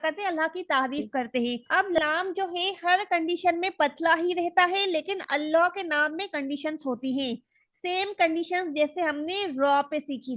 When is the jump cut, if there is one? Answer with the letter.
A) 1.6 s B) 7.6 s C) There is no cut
A